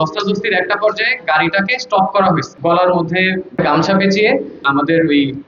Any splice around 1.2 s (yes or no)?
no